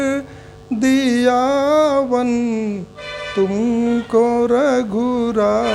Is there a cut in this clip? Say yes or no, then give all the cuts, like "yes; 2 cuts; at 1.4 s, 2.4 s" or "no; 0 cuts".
no; 0 cuts